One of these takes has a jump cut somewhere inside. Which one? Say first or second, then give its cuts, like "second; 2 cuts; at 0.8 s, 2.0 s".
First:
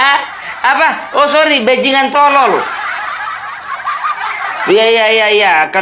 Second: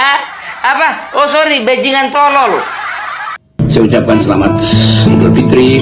second; 1 cut; at 3.6 s